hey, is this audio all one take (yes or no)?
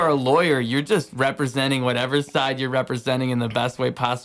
yes